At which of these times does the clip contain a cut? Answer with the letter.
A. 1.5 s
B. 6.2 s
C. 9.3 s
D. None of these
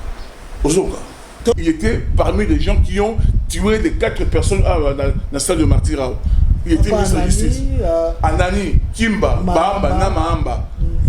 A